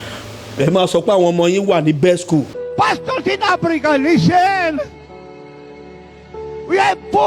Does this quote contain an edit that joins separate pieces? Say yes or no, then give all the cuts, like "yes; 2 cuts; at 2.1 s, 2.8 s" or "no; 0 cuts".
yes; 1 cut; at 2.4 s